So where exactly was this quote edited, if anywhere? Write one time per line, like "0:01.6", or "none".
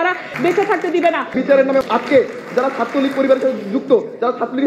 0:01.4